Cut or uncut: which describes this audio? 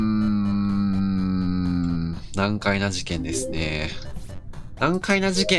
uncut